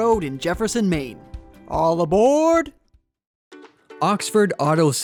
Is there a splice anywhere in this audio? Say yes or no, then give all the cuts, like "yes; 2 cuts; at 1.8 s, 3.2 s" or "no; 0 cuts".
no; 0 cuts